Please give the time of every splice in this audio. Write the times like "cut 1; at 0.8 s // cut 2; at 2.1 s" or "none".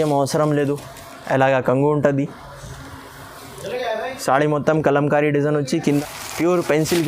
cut 1; at 5.8 s